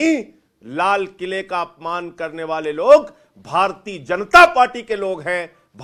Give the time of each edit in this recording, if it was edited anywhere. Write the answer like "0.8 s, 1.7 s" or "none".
none

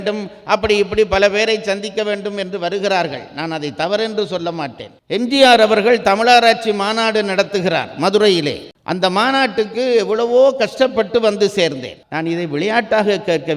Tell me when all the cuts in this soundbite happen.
4.9 s, 11.9 s

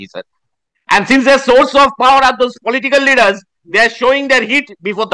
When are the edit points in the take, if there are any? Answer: none

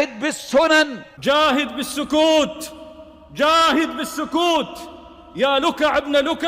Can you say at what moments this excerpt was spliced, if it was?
1.0 s

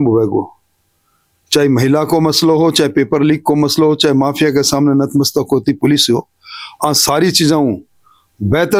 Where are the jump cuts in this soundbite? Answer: none

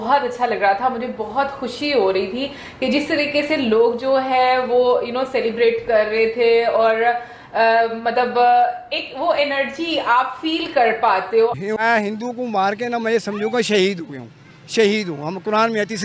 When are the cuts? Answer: 11.5 s

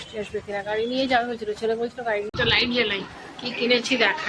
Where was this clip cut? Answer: 2.3 s

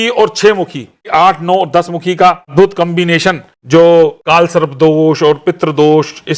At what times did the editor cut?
1.1 s, 2.5 s, 3.5 s, 4.2 s

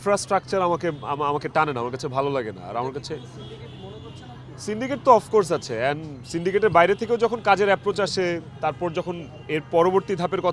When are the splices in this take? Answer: none

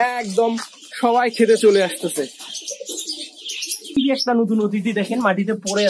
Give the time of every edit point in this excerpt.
4.0 s

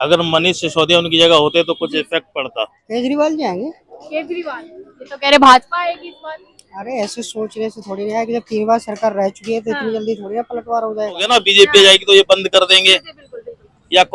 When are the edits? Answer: 2.8 s, 11.2 s

